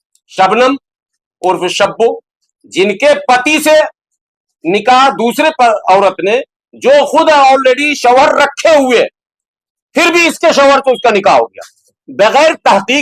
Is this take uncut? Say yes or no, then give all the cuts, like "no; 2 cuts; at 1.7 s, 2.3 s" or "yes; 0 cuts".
yes; 0 cuts